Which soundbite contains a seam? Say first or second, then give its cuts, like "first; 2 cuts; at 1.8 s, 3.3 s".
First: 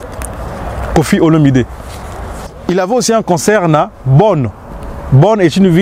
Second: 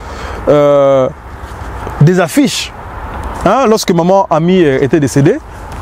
first; 1 cut; at 2.5 s